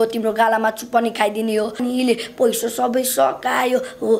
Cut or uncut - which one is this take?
cut